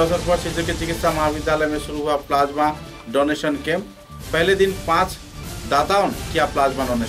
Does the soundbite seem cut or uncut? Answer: uncut